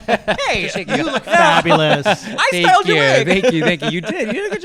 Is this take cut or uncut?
uncut